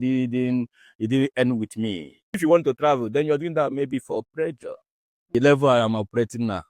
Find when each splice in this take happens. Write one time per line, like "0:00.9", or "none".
0:02.2
0:05.3